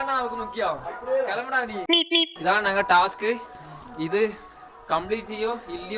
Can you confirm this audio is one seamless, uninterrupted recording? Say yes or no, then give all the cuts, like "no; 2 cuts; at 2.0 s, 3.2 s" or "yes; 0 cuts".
no; 1 cut; at 2.0 s